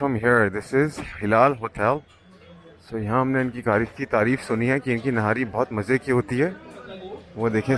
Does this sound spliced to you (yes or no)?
no